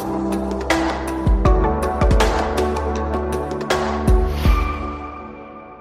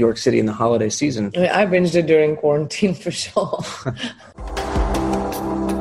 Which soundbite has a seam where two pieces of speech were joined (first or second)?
second